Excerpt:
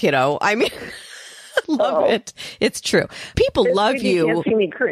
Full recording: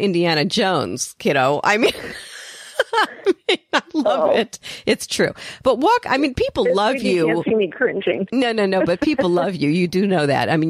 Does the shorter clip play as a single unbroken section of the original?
no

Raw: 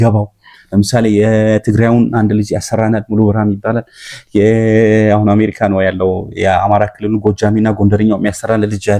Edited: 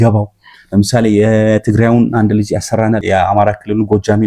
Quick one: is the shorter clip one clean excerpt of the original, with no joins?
no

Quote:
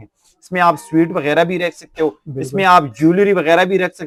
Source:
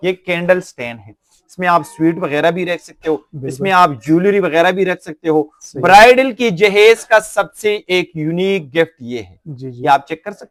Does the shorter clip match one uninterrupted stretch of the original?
yes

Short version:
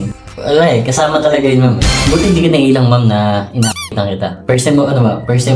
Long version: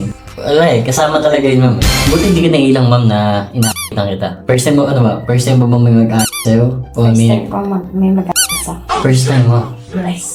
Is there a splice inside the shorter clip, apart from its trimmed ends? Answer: no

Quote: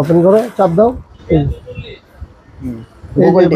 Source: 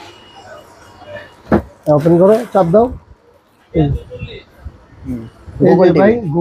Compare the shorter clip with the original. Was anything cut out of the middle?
yes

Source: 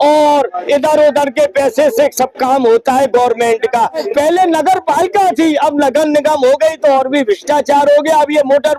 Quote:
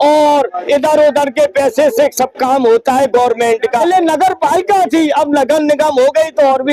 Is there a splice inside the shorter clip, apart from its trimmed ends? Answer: yes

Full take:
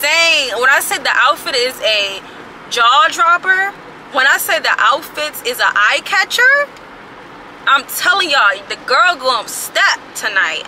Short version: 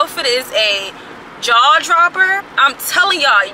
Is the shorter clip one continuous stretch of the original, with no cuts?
no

